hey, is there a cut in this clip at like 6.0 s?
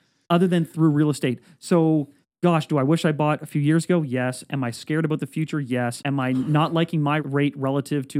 yes; 2 cuts; at 6.0 s, 7.2 s

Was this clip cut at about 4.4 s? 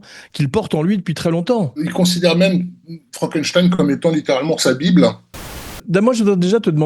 no; 2 cuts; at 1.8 s, 5.7 s

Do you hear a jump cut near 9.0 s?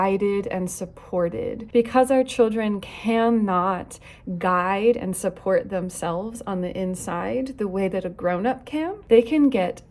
yes; 2 cuts; at 1.6 s, 9.0 s

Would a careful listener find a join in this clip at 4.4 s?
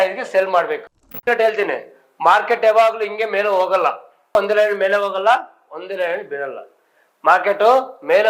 yes; 2 cuts; at 1.1 s, 4.4 s

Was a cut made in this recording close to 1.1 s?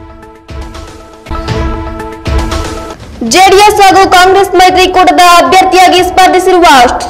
yes; 1 cut; at 1.1 s

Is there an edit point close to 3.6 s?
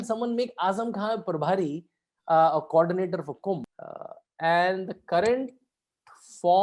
yes; 1 cut; at 3.6 s

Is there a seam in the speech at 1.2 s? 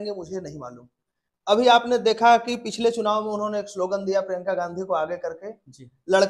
no; 0 cuts

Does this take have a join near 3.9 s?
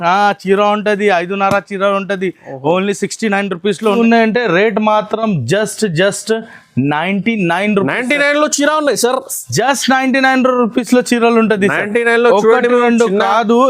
yes; 1 cut; at 3.9 s

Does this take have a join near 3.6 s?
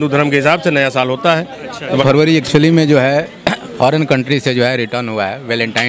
no; 1 cut; at 2.0 s

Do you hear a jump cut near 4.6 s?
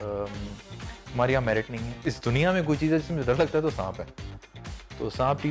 no; 1 cut; at 1.9 s

